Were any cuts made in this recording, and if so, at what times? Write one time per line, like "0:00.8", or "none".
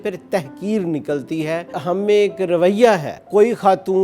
0:01.8
0:03.2